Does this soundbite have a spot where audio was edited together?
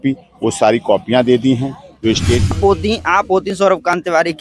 yes; 1 cut; at 2.5 s

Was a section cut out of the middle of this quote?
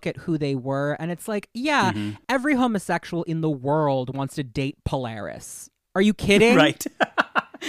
no; 0 cuts

